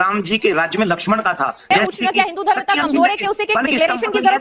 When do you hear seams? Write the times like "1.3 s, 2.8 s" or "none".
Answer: 1.7 s